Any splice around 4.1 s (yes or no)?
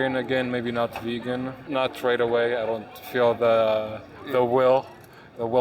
no